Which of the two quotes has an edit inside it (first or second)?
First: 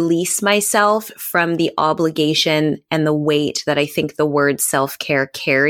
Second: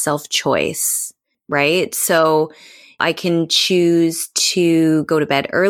second